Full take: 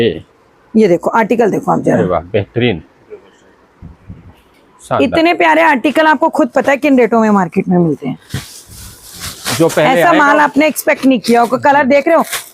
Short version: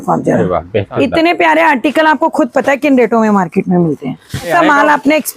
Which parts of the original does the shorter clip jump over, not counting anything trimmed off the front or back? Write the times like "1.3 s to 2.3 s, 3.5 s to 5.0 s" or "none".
2.5 s to 4.9 s, 8.5 s to 10.0 s